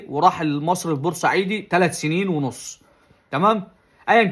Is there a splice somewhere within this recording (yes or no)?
no